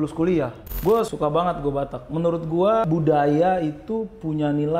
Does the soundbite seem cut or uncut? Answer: cut